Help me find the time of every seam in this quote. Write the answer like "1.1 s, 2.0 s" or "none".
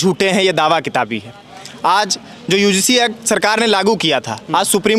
none